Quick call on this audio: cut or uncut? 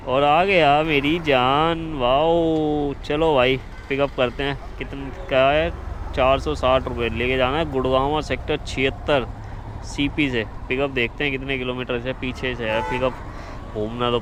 uncut